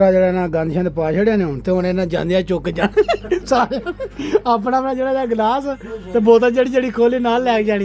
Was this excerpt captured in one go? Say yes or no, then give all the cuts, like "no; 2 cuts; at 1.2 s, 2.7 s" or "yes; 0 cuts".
yes; 0 cuts